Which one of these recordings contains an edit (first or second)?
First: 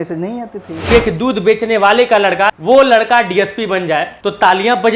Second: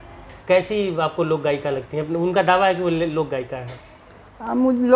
first